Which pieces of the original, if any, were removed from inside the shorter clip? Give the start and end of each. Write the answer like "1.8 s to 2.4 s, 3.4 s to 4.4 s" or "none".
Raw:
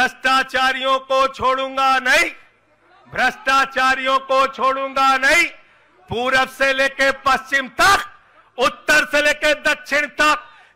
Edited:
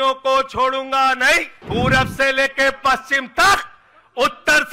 2.4 s to 6.0 s

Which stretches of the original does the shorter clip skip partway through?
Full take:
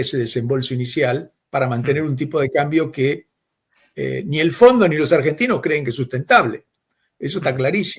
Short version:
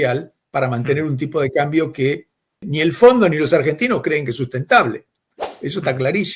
3.6 s to 4.2 s

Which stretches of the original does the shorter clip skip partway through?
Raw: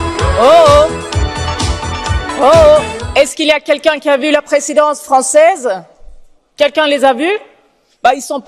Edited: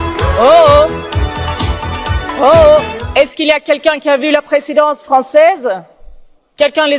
none

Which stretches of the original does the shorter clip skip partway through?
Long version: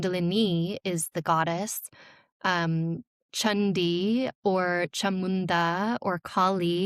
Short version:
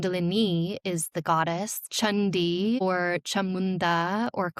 1.8 s to 3.2 s, 4.2 s to 4.5 s

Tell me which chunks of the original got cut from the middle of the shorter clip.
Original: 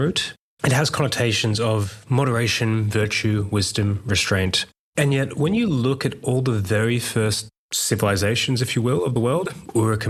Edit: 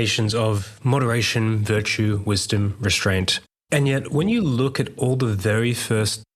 none

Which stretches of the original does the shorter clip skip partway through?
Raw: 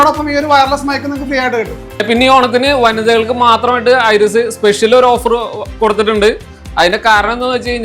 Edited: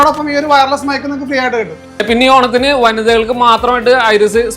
none

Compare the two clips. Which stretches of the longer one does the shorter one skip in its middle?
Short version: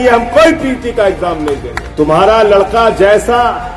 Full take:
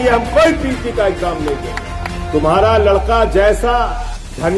1.8 s to 2.1 s

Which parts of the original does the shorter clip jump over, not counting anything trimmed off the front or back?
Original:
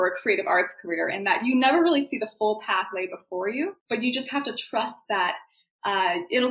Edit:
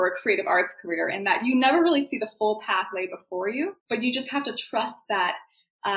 none

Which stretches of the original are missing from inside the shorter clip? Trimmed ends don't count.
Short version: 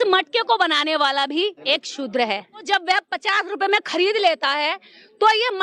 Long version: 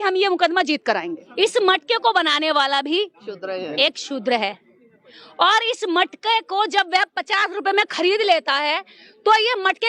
3.1 s to 3.7 s, 4.8 s to 6.7 s

